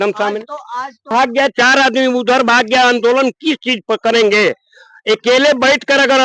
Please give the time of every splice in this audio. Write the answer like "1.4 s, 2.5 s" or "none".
1.1 s